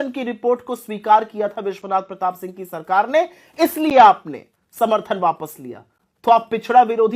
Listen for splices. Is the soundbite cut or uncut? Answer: uncut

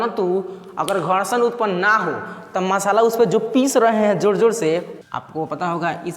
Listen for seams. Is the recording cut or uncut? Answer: cut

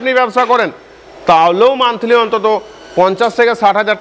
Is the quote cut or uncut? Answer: uncut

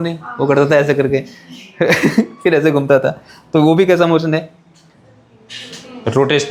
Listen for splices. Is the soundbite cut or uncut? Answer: uncut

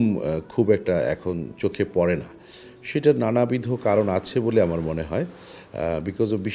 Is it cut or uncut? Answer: uncut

